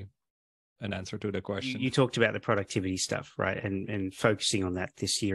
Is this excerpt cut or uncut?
cut